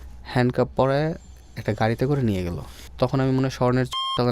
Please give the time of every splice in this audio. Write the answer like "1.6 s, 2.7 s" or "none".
2.8 s